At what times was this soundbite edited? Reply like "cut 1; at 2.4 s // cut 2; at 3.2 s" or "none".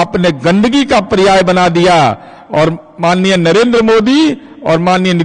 none